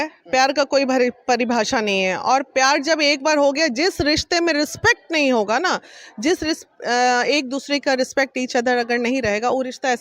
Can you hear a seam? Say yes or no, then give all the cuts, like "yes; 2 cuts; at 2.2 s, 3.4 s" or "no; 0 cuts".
no; 0 cuts